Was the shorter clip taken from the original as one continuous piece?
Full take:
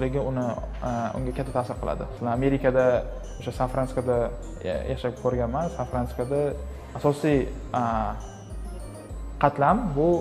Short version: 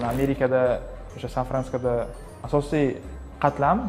no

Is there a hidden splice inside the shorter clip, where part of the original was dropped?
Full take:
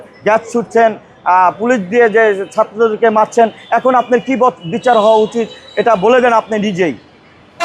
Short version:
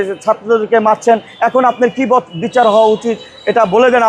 no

